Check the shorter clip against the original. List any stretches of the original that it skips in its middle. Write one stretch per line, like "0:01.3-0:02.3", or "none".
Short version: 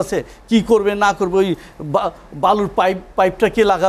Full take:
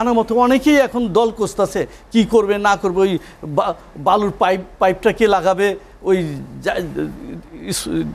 none